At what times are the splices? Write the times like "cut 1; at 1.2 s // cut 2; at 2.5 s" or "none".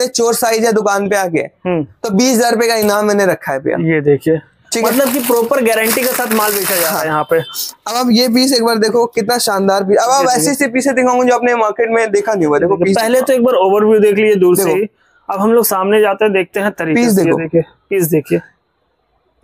none